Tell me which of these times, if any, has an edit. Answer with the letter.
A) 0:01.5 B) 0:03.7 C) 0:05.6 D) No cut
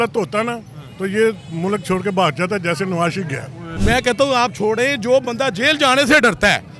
B